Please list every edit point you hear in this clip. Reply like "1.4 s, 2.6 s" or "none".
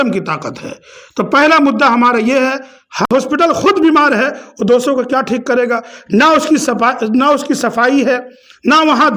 3.1 s